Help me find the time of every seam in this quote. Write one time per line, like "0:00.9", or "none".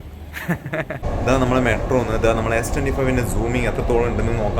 0:01.2